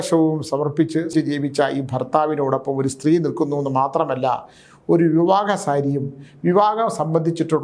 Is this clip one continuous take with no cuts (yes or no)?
no